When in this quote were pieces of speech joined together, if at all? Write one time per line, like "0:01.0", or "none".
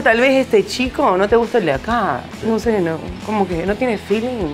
none